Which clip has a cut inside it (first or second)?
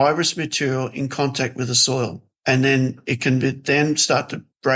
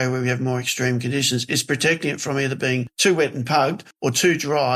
second